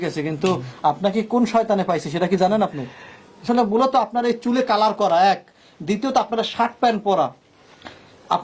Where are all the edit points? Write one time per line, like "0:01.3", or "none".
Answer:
0:03.4